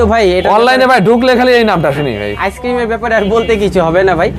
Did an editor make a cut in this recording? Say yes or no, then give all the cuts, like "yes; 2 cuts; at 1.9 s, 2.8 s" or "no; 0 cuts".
no; 0 cuts